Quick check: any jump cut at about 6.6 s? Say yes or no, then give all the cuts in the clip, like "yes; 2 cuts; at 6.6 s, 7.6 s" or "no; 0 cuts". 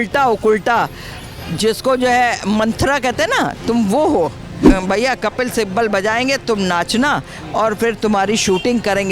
no; 1 cut; at 4.6 s